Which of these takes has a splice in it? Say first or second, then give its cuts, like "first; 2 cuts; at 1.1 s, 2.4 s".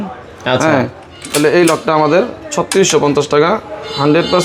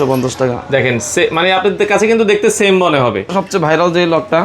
second; 1 cut; at 3.3 s